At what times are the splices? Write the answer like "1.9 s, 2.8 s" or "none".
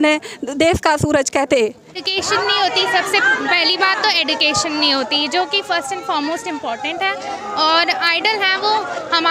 2.1 s